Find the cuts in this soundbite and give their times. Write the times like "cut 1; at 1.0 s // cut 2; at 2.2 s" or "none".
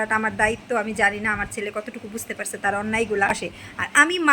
cut 1; at 3.4 s